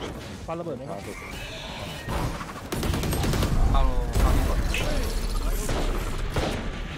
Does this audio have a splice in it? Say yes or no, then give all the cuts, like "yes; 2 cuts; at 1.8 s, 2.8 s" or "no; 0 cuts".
no; 0 cuts